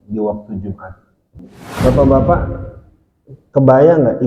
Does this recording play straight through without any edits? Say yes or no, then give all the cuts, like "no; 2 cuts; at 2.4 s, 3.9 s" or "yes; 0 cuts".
no; 1 cut; at 1.6 s